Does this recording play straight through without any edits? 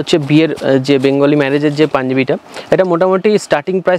yes; 0 cuts

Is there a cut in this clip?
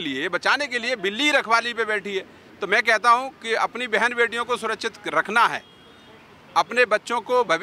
no; 0 cuts

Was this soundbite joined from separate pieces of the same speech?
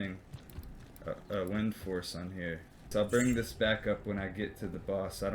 yes; 1 cut; at 2.9 s

